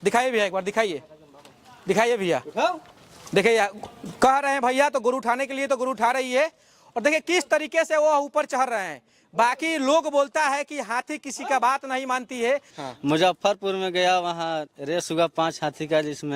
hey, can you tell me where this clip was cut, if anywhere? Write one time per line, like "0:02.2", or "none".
0:12.7